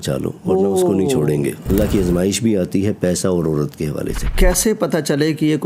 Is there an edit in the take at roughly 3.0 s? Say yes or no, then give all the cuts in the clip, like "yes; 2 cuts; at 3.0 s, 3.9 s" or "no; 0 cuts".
no; 2 cuts; at 1.7 s, 4.3 s